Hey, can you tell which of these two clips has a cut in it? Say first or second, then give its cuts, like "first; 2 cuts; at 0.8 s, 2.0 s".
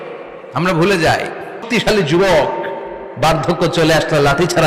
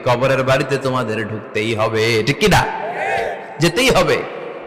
first; 1 cut; at 1.6 s